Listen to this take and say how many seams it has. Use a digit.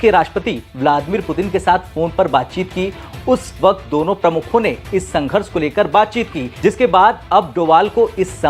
0